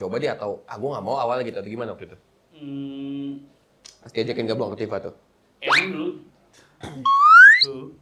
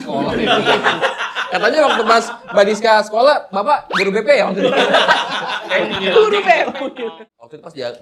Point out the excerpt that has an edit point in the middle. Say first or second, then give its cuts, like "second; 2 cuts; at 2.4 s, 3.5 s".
second; 1 cut; at 6.9 s